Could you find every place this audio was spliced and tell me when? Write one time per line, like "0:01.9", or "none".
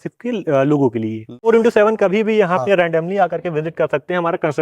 0:01.3